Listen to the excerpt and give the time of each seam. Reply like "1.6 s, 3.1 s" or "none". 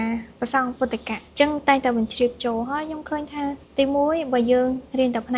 1.2 s, 3.6 s